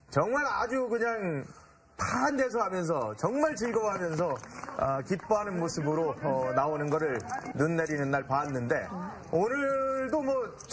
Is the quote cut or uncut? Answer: cut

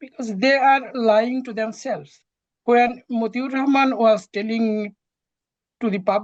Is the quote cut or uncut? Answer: uncut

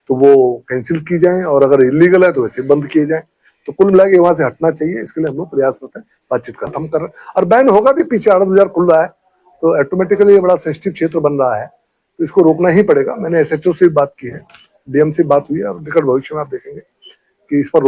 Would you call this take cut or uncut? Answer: cut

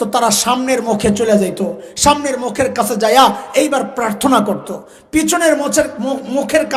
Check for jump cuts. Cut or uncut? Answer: uncut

